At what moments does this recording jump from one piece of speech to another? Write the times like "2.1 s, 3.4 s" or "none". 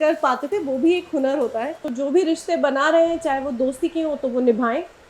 1.8 s